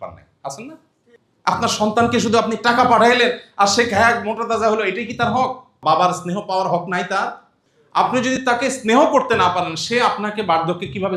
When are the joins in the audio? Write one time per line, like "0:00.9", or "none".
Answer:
0:05.7